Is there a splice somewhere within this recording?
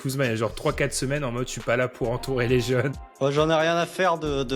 no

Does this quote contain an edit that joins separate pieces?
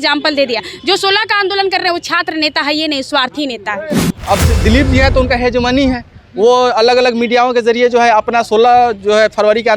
yes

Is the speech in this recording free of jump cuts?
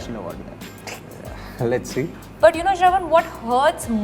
no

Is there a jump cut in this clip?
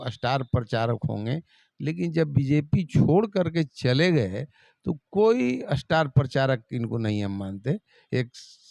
no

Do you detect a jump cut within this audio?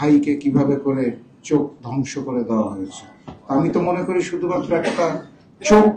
no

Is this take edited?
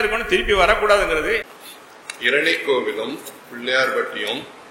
yes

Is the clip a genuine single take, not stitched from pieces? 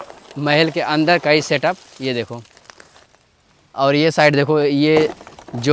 yes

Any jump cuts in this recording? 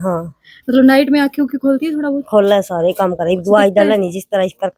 no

